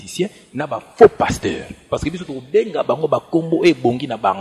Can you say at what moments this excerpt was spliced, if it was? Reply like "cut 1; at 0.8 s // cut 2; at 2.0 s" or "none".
cut 1; at 1.9 s